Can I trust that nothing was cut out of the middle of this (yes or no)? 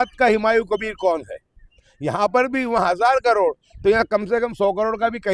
yes